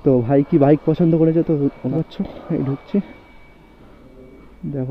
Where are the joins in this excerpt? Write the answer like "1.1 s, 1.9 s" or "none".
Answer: 1.9 s